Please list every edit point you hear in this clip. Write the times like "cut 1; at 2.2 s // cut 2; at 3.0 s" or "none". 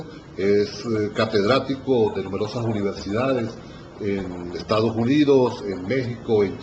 cut 1; at 5.6 s